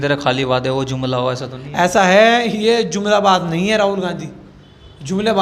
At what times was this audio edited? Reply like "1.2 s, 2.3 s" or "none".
none